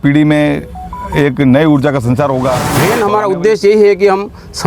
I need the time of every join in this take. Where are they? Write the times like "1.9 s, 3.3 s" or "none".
2.7 s